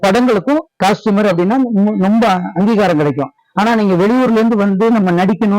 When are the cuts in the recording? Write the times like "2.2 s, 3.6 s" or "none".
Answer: 0.8 s, 3.4 s